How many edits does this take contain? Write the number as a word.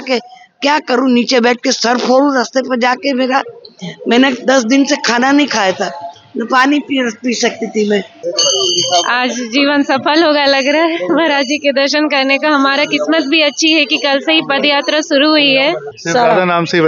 two